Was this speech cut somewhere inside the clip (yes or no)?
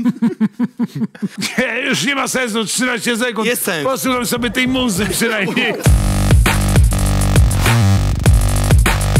yes